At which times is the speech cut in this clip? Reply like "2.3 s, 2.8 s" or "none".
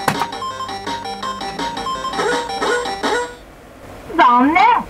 none